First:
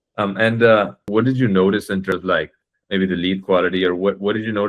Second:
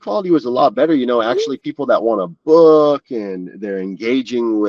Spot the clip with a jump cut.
first; 2 cuts; at 1.0 s, 2.1 s

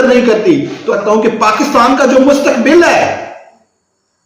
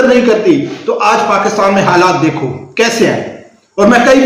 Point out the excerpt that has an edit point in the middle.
first; 1 cut; at 1.0 s

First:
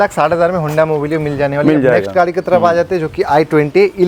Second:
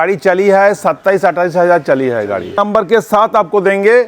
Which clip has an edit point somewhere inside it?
second; 1 cut; at 2.6 s

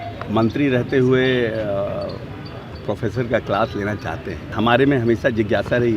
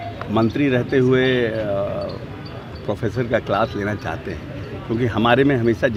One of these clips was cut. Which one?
first; 1 cut; at 4.5 s

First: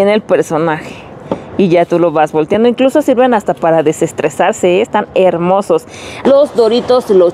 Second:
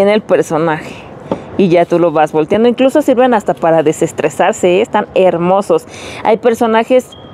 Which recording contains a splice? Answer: first; 1 cut; at 6.1 s

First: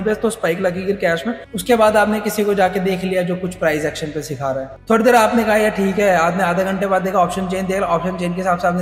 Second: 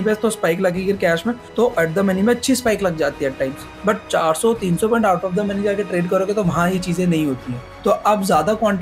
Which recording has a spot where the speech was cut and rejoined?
first; 2 cuts; at 1.4 s, 4.7 s

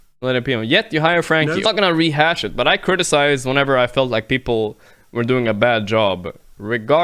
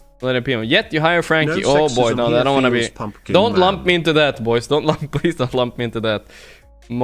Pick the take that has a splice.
first; 1 cut; at 1.7 s

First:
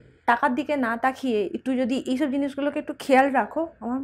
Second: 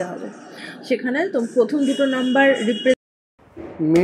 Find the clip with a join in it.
second; 1 cut; at 3.0 s

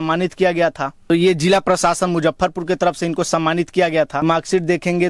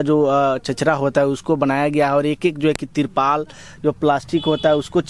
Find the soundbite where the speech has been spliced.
first; 2 cuts; at 1.0 s, 4.2 s

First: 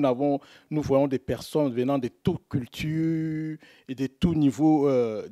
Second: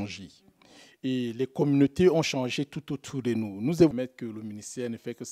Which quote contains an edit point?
second; 1 cut; at 3.9 s

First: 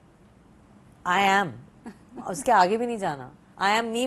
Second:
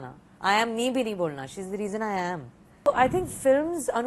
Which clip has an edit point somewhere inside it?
second; 1 cut; at 2.9 s

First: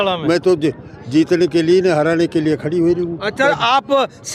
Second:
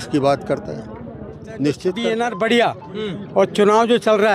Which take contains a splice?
second; 1 cut; at 2.0 s

